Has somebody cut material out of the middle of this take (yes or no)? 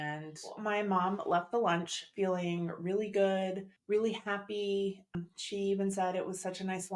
yes